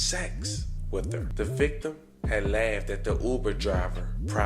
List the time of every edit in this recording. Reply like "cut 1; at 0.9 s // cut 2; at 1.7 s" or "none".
cut 1; at 1.3 s